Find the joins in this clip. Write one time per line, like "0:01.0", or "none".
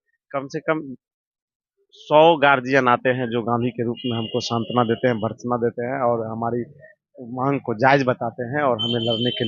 none